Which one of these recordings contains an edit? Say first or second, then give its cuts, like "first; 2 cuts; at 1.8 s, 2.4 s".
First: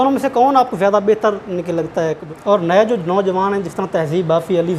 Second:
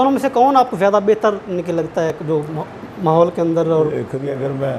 first; 1 cut; at 2.2 s